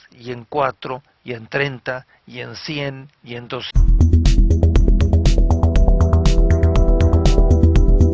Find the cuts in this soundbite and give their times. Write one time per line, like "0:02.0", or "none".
none